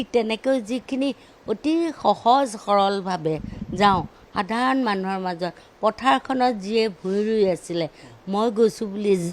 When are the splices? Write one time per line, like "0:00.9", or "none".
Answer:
none